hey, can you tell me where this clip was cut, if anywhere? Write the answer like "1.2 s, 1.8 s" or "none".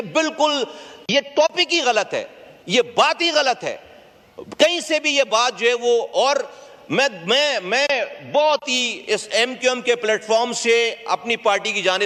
none